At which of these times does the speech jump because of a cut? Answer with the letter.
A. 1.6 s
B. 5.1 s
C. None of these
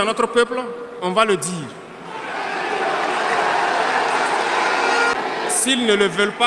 B